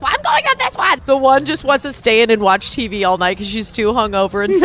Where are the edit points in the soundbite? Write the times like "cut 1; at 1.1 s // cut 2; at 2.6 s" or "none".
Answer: cut 1; at 0.9 s // cut 2; at 2.0 s